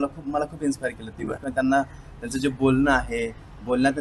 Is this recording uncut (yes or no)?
yes